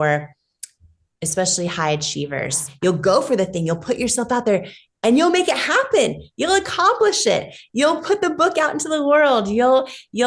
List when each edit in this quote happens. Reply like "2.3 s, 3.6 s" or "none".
2.7 s